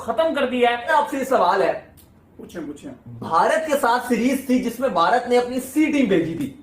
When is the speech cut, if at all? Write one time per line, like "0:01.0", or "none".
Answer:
0:00.9